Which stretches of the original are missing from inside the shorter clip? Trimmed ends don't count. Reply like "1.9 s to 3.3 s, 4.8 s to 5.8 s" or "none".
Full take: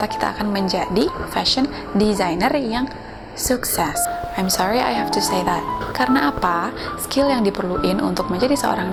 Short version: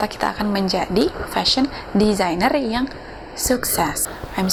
none